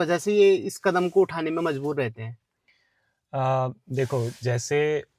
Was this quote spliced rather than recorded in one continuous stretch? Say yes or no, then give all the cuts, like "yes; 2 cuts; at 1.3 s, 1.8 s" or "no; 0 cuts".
no; 0 cuts